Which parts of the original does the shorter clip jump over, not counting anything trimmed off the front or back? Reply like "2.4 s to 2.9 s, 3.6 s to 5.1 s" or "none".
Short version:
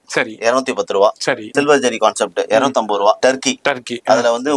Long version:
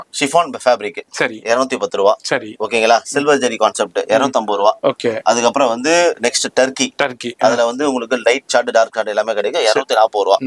2.5 s to 3.1 s, 4.8 s to 6.5 s